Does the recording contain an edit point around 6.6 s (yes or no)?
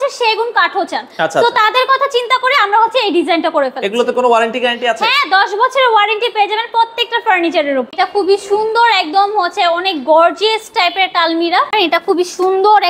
no